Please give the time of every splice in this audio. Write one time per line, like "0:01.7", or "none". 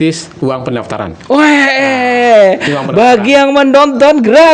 none